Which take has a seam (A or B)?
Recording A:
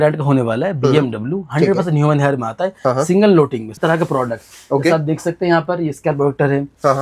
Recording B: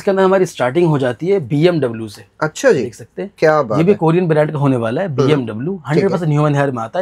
A